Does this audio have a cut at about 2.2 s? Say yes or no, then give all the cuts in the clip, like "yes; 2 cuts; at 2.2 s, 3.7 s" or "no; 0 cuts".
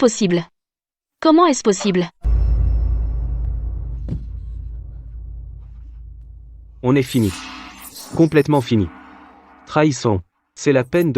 yes; 1 cut; at 2.2 s